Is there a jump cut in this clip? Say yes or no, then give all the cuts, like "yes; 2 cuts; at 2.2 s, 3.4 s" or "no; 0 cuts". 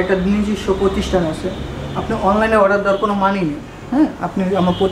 no; 0 cuts